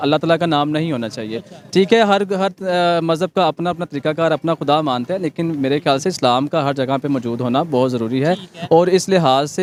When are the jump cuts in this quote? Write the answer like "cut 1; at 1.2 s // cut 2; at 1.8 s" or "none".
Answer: none